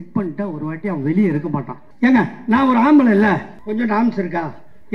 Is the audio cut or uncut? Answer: cut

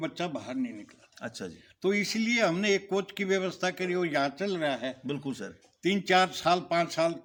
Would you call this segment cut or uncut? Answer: uncut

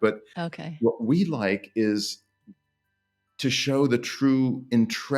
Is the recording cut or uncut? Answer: uncut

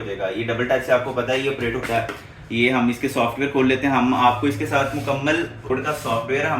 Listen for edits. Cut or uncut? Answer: cut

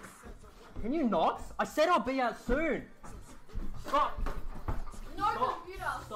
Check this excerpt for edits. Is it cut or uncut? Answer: cut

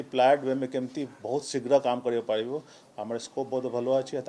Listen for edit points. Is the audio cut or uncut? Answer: uncut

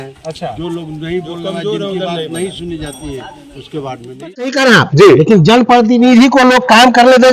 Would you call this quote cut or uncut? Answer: cut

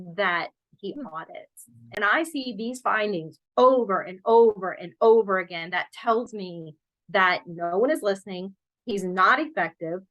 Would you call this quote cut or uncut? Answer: cut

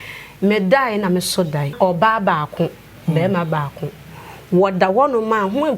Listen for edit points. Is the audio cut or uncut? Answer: cut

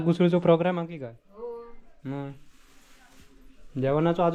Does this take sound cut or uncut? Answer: uncut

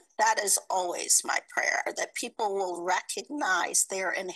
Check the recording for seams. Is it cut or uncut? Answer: uncut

